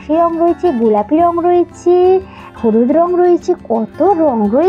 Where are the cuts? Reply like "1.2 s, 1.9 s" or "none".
2.4 s